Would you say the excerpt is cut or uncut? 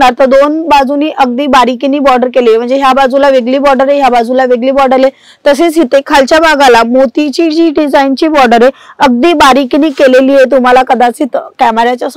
uncut